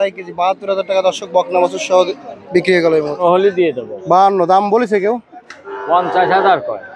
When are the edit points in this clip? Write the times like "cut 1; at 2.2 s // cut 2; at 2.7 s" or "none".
cut 1; at 3.2 s